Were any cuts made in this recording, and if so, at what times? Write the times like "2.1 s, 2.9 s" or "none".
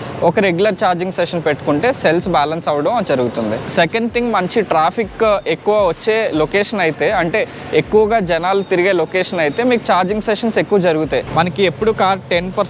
3.6 s, 11.2 s